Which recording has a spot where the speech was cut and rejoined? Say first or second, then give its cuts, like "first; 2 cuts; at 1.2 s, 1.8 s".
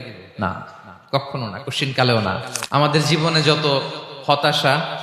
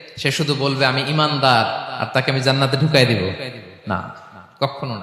first; 1 cut; at 2.6 s